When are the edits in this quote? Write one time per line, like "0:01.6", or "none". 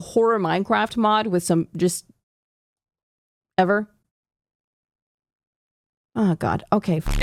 none